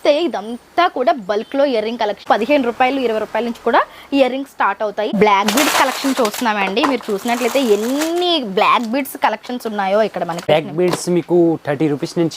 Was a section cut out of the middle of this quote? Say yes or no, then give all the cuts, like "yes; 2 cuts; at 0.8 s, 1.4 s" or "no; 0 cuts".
yes; 3 cuts; at 2.2 s, 5.1 s, 10.5 s